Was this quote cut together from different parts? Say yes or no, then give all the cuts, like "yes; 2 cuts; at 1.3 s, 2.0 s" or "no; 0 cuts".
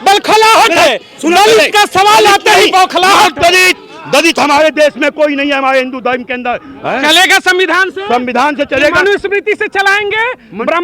yes; 1 cut; at 6.7 s